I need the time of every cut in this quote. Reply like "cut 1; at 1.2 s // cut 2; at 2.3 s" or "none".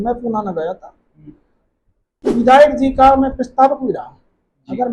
cut 1; at 2.3 s